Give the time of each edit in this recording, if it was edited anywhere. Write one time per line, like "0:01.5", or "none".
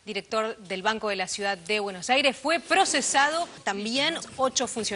0:03.6